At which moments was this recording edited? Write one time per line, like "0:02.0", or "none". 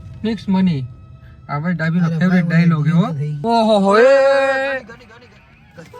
0:03.3